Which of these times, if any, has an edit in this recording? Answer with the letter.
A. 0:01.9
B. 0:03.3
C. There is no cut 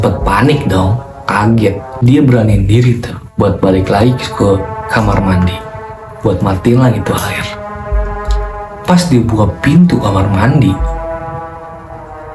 A